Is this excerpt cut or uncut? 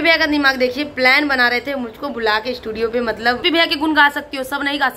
cut